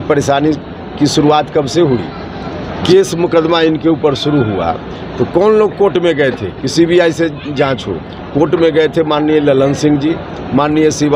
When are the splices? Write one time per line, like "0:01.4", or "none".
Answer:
0:02.8